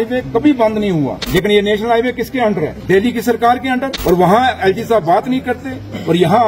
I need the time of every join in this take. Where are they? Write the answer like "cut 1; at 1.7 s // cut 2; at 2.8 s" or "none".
cut 1; at 1.2 s // cut 2; at 2.8 s // cut 3; at 3.9 s